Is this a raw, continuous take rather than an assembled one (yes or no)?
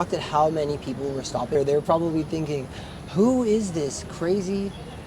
no